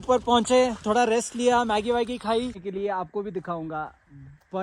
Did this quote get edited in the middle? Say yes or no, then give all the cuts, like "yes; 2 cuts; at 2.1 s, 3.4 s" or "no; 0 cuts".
yes; 1 cut; at 2.6 s